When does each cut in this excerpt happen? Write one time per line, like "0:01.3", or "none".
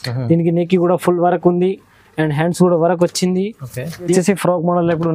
0:04.1